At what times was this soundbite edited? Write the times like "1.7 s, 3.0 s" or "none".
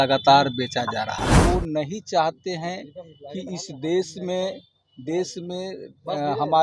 1.4 s

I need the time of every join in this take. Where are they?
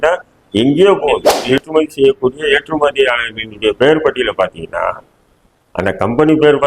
1.6 s

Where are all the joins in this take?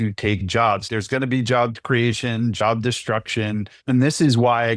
0.9 s, 1.8 s, 3.7 s

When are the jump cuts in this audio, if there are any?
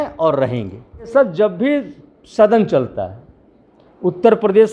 1.1 s

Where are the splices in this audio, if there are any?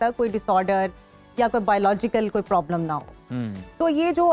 none

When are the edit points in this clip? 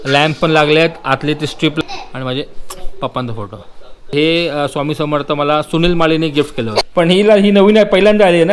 1.8 s, 4.1 s, 6.8 s

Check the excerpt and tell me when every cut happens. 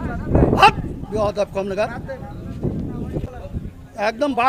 3.2 s

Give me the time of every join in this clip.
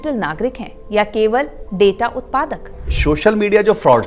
2.9 s

